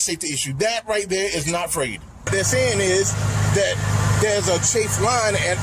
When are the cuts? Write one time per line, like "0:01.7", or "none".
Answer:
0:02.3